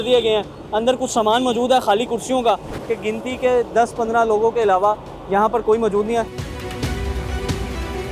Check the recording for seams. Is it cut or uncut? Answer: cut